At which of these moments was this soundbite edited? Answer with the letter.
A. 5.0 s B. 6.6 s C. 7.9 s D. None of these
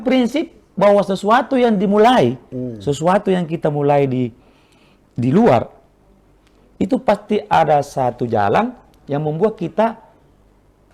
D